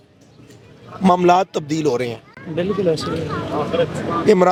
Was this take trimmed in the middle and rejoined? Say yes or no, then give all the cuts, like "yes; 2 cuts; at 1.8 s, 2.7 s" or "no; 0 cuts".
no; 0 cuts